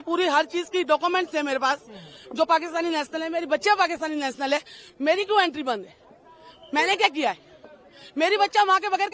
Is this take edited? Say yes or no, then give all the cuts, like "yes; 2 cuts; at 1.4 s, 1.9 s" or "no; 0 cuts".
no; 0 cuts